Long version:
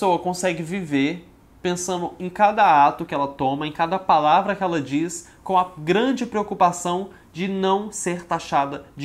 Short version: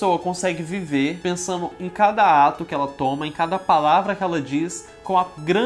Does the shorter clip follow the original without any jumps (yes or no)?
no